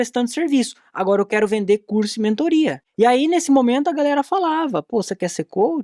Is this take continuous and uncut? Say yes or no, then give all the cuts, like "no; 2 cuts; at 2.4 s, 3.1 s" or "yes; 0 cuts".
no; 1 cut; at 2.8 s